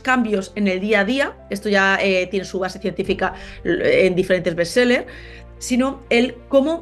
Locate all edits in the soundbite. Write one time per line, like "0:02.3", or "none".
none